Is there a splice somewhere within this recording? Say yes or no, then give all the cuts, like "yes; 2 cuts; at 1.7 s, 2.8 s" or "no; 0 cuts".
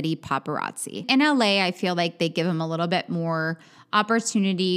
yes; 1 cut; at 1.1 s